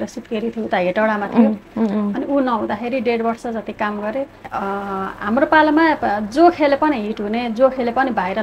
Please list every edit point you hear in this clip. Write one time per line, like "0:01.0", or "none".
0:04.5